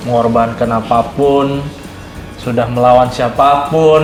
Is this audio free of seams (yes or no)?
yes